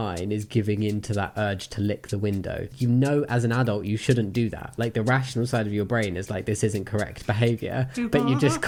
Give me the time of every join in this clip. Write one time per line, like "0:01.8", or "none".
none